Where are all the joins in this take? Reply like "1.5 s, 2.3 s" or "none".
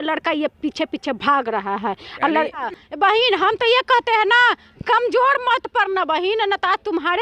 2.6 s